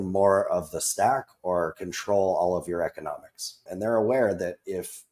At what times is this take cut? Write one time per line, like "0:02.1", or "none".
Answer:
0:03.7